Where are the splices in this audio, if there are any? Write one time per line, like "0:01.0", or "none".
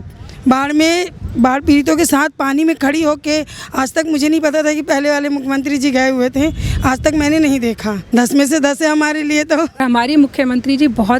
0:07.9
0:09.8